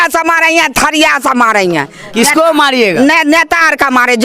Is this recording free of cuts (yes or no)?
yes